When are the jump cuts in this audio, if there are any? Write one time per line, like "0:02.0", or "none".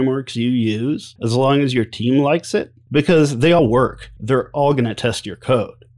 0:01.1
0:02.8
0:03.6